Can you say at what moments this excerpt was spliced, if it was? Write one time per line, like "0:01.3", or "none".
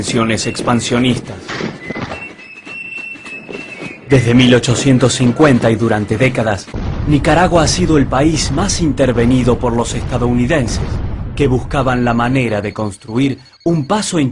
0:09.3